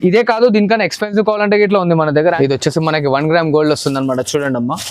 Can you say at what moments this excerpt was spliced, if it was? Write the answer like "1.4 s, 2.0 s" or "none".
2.4 s